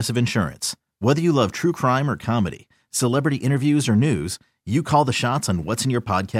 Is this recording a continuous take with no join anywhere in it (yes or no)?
yes